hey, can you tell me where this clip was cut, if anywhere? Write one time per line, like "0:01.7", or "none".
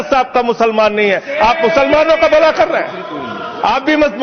none

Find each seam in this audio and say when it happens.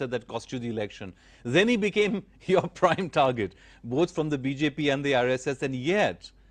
0:01.1

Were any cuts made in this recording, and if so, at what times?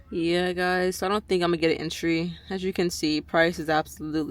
none

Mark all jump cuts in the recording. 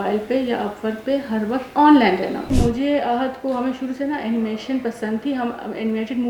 0:02.5

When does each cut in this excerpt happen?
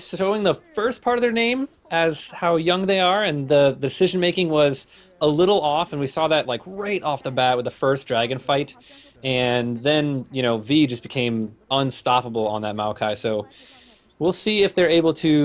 none

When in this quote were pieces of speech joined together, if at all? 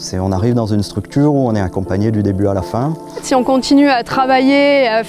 0:03.1

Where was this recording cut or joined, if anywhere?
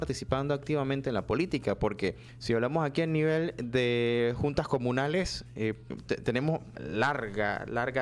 0:02.3
0:05.9
0:06.8

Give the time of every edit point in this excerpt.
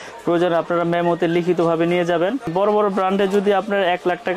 0:02.5

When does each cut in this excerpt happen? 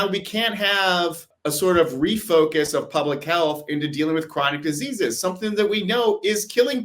0:01.3

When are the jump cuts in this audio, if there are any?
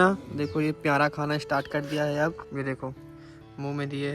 0:02.4

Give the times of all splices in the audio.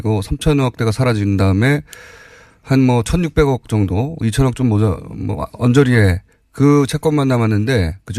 none

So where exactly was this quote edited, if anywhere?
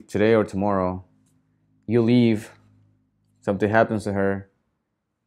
none

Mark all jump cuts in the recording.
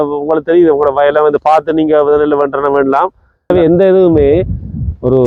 0:03.5

